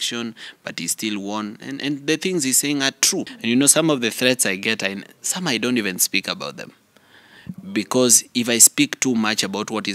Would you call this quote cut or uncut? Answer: cut